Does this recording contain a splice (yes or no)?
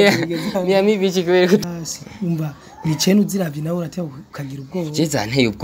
yes